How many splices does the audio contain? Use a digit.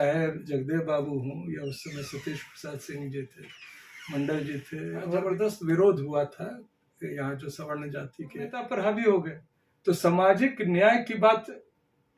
2